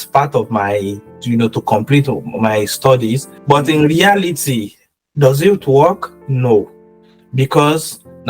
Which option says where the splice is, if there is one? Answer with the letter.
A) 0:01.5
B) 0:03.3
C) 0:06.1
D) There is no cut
B